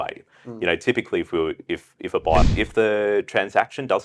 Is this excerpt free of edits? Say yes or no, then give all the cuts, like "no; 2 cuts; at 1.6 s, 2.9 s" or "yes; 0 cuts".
no; 1 cut; at 2.5 s